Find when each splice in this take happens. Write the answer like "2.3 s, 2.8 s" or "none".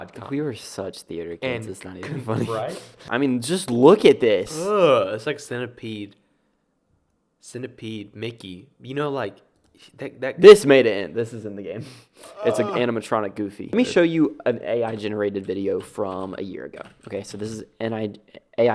3.0 s, 13.8 s